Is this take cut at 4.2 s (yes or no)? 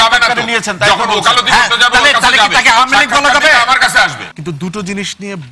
yes